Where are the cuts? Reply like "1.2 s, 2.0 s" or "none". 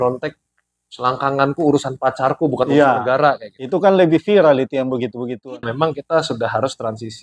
5.6 s